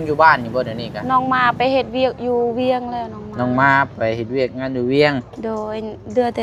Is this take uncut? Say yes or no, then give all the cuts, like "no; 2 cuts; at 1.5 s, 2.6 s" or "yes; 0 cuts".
yes; 0 cuts